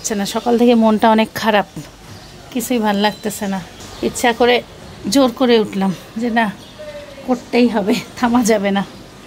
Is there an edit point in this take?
no; 0 cuts

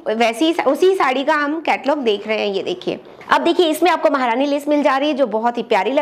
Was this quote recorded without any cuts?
no; 1 cut; at 3.1 s

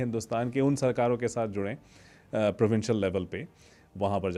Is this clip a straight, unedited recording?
yes; 0 cuts

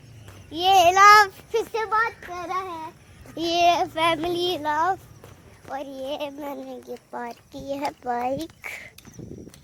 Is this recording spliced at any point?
no; 0 cuts

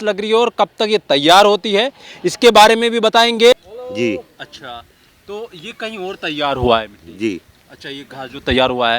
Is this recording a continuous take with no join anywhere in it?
no; 1 cut; at 3.5 s

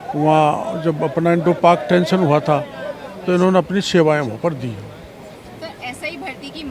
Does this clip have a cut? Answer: no; 0 cuts

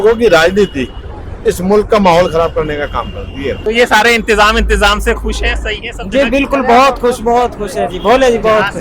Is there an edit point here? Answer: yes; 1 cut; at 3.6 s

